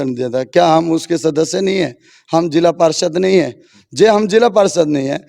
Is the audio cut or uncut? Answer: uncut